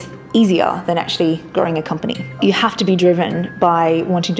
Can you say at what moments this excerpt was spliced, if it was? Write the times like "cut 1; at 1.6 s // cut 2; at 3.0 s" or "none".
cut 1; at 2.4 s